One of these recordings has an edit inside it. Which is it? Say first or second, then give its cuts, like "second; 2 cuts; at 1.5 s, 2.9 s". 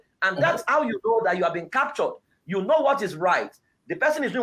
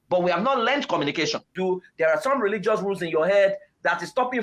second; 1 cut; at 1.5 s